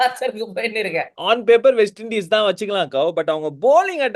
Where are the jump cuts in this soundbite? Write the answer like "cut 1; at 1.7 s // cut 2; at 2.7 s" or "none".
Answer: cut 1; at 1.1 s